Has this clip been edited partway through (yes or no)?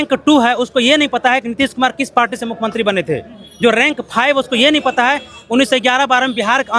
no